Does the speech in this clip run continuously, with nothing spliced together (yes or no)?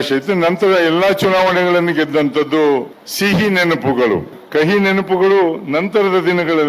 no